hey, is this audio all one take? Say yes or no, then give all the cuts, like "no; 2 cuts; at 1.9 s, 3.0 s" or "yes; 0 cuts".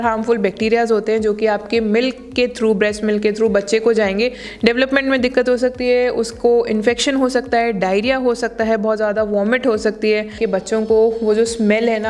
no; 2 cuts; at 4.5 s, 10.4 s